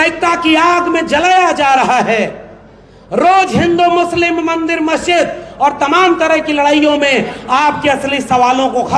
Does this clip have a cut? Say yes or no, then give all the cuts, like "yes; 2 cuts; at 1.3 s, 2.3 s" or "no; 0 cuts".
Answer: no; 0 cuts